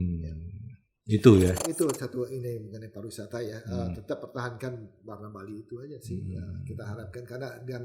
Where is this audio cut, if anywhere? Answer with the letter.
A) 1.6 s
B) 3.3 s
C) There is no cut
A